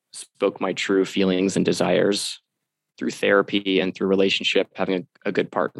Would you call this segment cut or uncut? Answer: cut